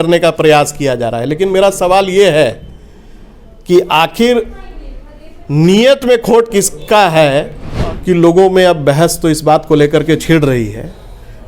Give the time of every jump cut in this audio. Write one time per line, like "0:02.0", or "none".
0:07.6

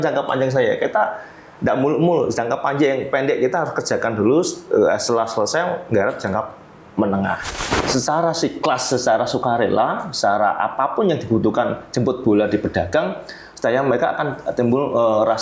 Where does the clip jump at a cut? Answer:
0:07.5

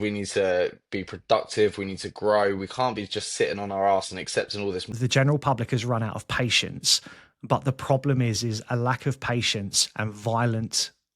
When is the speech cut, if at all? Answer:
0:04.9

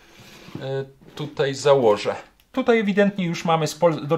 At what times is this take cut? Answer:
0:02.5

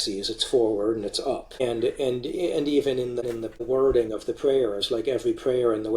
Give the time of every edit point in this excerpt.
0:01.6
0:03.2

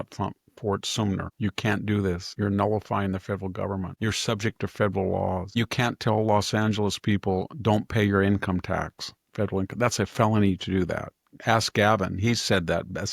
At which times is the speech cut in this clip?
0:01.3
0:02.3
0:03.9
0:05.5

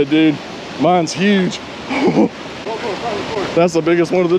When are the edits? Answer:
none

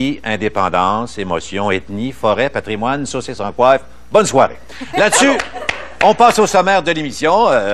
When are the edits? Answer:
0:01.8

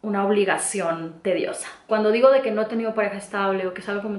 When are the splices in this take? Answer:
0:01.8

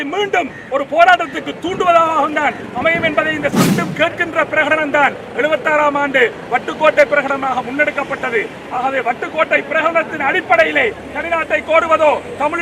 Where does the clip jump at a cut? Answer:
0:03.7

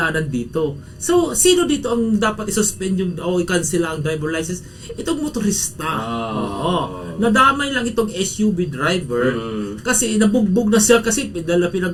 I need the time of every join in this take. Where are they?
none

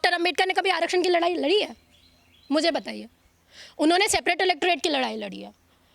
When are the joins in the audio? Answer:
none

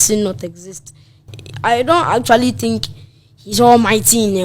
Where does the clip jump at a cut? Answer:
0:01.3

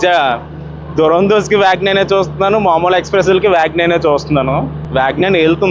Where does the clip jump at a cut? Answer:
0:04.8

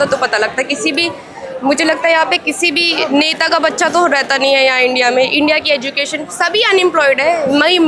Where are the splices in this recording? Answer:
none

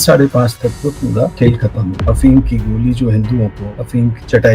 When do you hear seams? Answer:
0:02.0

